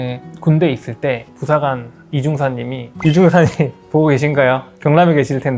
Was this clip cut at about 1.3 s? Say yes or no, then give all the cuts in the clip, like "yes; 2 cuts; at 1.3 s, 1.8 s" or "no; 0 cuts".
no; 1 cut; at 2.9 s